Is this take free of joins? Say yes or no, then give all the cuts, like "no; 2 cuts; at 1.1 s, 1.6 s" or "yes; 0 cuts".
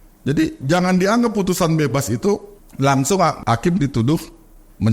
no; 2 cuts; at 2.6 s, 3.4 s